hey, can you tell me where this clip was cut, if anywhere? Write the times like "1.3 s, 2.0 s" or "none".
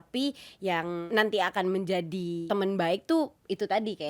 1.0 s, 2.4 s